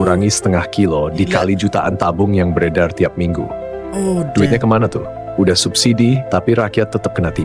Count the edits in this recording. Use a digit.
0